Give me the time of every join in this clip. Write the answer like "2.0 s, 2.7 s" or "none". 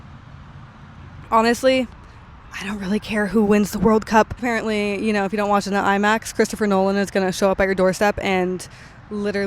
1.2 s, 4.4 s